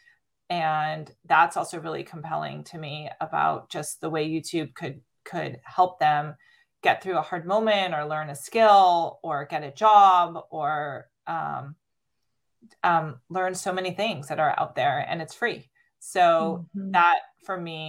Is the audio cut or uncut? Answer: uncut